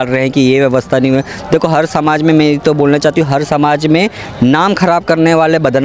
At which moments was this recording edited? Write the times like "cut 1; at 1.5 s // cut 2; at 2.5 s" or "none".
none